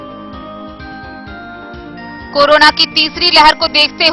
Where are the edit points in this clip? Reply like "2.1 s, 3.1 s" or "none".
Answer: 1.7 s